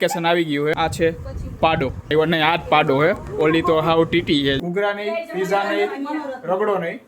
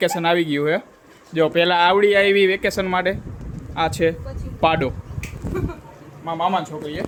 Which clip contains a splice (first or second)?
first